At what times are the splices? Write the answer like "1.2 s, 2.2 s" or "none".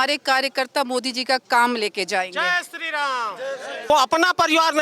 3.9 s